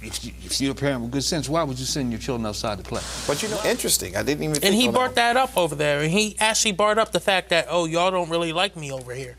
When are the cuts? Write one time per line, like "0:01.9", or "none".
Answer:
0:03.4

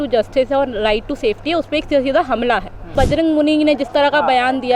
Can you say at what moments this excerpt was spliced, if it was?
0:02.9

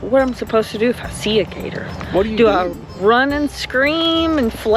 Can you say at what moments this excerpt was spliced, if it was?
none

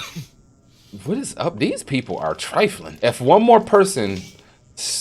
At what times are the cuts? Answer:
0:02.8

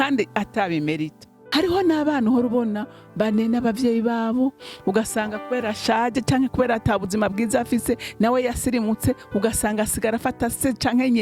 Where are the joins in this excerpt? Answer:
0:01.4

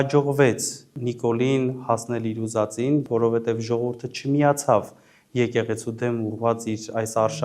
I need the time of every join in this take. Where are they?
0:00.9
0:03.0

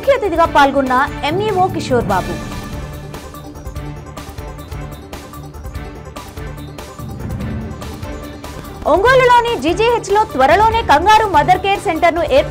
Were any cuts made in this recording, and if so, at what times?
none

